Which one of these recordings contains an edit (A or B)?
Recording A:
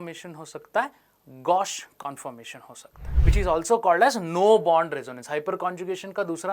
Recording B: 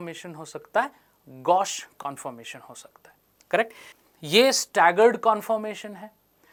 A